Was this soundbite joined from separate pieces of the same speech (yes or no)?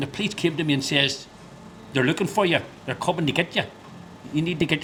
no